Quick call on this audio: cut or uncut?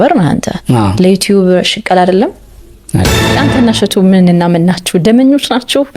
cut